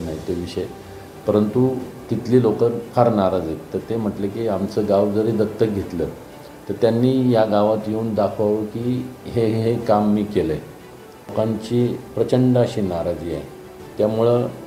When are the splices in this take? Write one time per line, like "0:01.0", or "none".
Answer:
0:11.3